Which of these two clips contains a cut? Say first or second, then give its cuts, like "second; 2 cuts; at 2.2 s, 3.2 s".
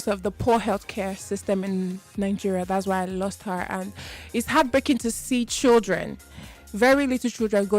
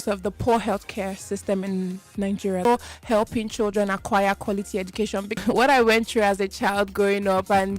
second; 2 cuts; at 2.7 s, 5.4 s